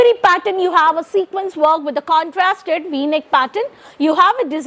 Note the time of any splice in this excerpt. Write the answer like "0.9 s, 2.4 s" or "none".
none